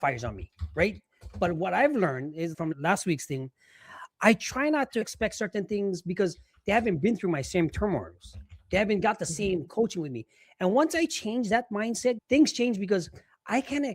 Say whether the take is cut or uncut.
cut